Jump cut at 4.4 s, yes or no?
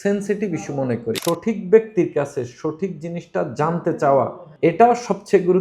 yes